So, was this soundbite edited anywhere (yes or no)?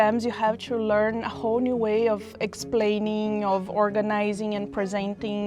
no